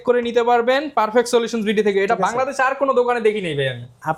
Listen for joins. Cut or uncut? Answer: uncut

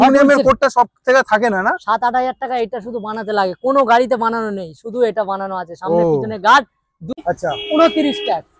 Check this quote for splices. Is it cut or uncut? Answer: cut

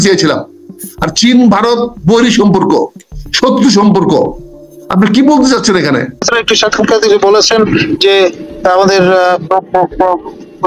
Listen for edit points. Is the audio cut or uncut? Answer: cut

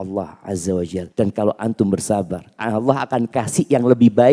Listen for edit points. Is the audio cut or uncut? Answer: cut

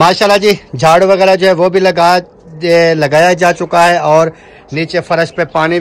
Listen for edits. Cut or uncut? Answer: uncut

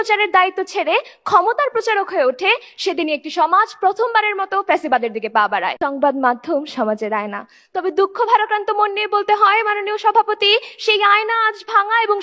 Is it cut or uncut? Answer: cut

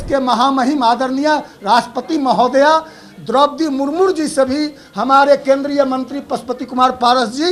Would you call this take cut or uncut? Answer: uncut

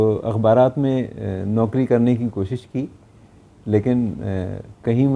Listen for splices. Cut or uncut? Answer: uncut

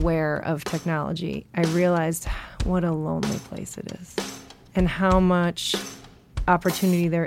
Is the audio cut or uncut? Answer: cut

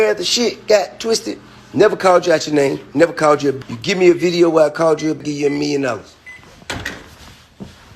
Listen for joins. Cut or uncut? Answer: cut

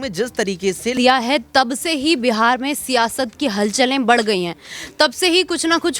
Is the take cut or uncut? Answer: cut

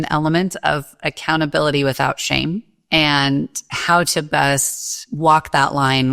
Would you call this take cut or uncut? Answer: cut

